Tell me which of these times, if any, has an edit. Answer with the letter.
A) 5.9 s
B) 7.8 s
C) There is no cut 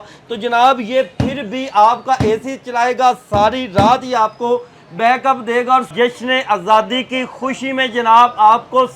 A